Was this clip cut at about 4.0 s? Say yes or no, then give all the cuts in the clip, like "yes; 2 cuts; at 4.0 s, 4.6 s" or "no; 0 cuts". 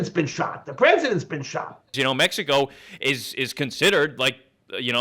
no; 1 cut; at 1.9 s